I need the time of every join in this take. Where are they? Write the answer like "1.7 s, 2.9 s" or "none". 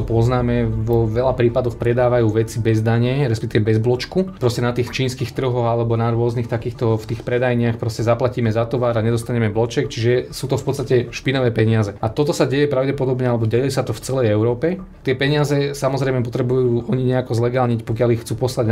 none